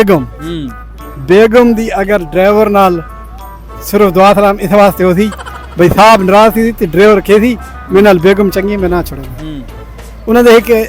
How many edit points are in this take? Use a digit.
0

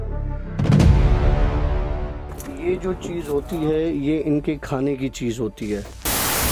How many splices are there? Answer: 0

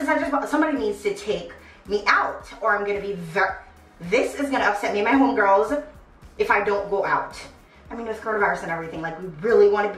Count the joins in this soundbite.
0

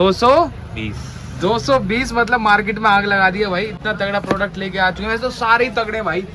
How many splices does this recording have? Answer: 0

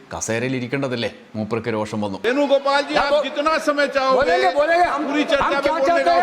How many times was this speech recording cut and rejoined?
1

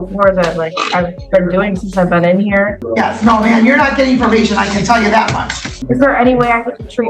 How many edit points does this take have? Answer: 2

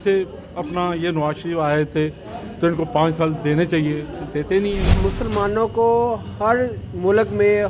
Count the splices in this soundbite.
1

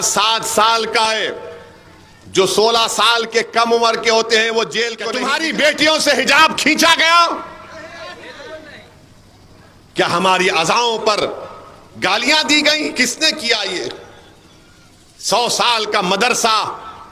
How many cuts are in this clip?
1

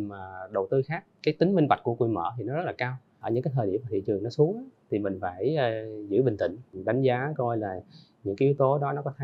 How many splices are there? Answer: 3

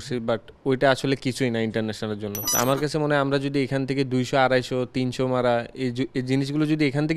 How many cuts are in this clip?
1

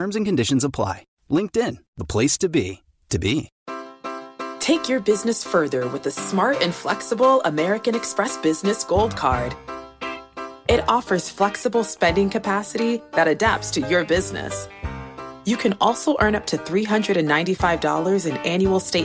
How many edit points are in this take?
1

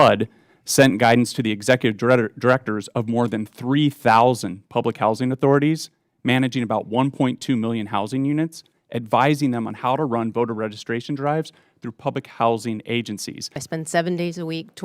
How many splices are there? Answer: 1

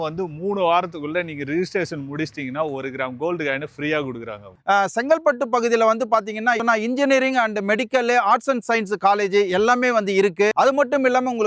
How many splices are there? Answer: 3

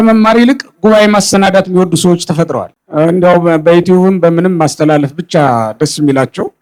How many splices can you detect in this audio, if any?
0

